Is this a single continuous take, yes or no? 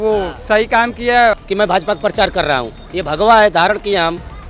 no